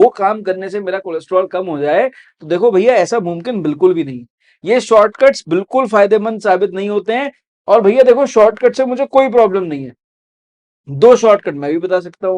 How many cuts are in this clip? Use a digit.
1